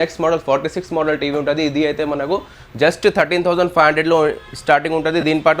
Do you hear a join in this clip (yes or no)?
no